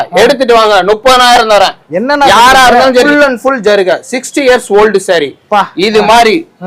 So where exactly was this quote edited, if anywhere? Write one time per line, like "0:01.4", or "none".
0:03.1